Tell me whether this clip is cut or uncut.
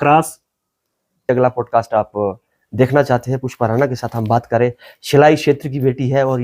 cut